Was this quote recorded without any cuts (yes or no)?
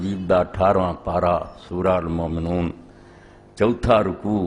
no